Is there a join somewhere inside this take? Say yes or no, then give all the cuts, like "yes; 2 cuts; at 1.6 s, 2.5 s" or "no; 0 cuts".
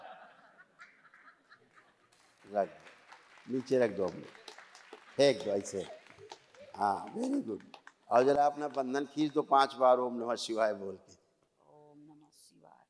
no; 0 cuts